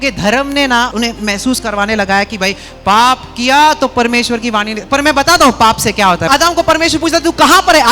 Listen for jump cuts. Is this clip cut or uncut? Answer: cut